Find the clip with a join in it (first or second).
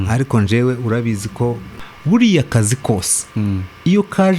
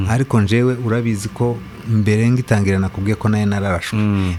first